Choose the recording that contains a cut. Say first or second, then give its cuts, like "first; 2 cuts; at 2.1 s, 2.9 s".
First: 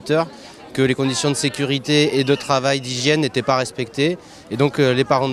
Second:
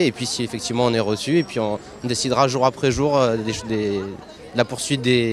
second; 1 cut; at 1.1 s